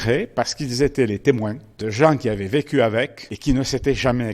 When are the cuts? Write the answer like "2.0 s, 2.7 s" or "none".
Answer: 3.2 s